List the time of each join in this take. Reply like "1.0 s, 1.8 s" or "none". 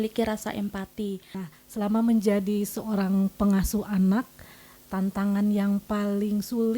1.4 s